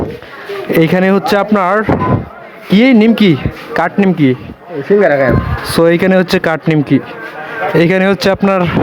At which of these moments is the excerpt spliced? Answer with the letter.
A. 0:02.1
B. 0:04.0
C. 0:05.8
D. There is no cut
D